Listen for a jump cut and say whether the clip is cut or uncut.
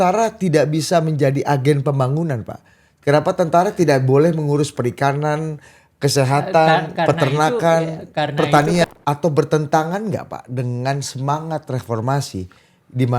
cut